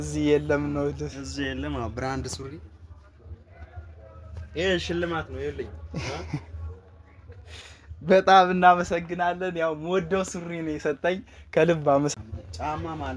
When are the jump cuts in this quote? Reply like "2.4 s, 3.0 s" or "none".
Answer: 12.1 s

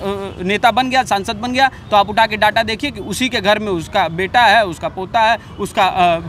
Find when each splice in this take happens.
none

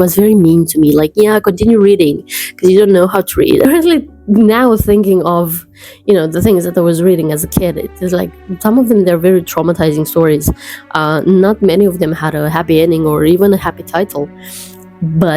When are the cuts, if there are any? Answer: 3.6 s

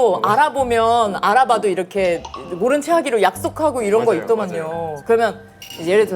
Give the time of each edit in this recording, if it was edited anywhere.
4.9 s

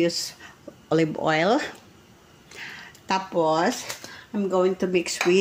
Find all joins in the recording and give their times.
none

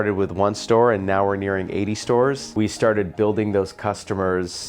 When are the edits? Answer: 2.5 s

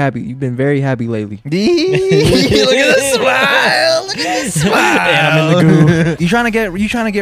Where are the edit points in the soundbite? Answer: 6.2 s

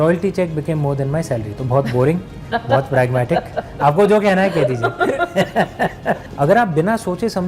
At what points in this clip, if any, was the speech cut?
6.3 s

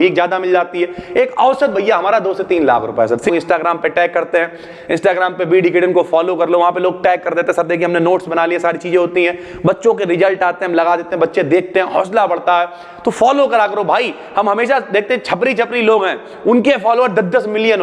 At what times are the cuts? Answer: 3.3 s

